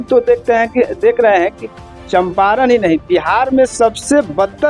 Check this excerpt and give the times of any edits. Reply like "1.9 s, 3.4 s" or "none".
none